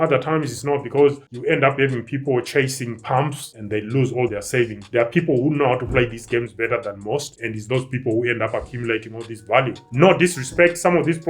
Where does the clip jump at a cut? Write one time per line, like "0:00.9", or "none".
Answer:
0:09.8